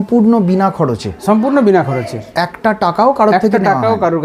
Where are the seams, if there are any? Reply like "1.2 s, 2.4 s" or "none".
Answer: none